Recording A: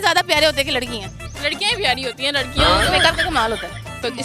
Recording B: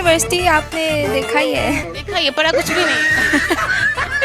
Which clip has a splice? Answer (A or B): B